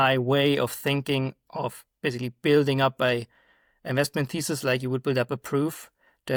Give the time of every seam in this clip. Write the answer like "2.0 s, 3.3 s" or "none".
none